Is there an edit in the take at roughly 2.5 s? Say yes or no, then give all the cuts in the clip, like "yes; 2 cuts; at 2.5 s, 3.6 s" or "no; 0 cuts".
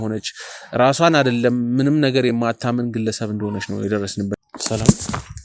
no; 1 cut; at 4.4 s